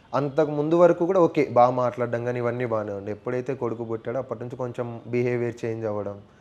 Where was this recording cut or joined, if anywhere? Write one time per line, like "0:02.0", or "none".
none